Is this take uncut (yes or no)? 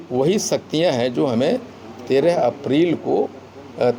yes